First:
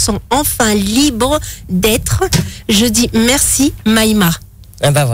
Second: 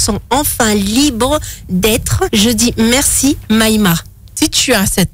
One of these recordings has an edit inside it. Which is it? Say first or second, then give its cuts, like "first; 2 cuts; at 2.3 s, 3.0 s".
second; 2 cuts; at 2.3 s, 4.2 s